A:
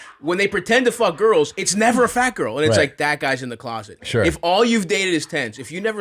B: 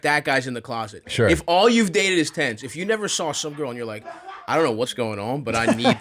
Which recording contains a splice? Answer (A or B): B